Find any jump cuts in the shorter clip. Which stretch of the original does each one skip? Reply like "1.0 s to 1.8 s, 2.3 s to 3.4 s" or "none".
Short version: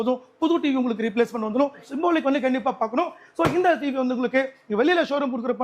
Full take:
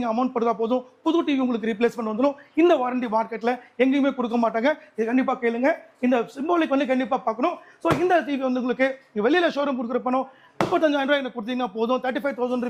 2.5 s to 6.3 s